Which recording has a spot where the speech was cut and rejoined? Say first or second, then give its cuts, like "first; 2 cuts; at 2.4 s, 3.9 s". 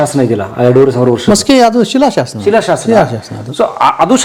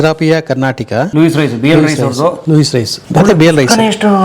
second; 2 cuts; at 1.1 s, 2.6 s